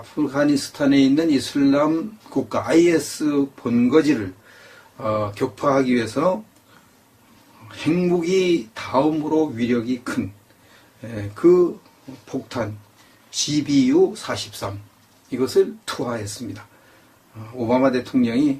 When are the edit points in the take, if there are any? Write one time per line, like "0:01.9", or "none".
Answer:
0:01.9